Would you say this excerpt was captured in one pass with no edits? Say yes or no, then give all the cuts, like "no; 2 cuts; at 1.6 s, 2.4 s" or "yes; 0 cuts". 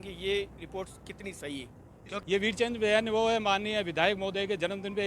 no; 1 cut; at 2.2 s